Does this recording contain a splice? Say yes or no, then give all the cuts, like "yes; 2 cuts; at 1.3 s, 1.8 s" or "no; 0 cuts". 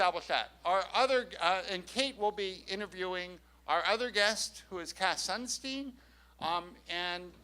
yes; 1 cut; at 3.3 s